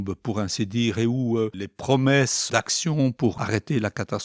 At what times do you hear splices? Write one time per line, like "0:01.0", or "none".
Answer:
0:01.6
0:02.4
0:03.3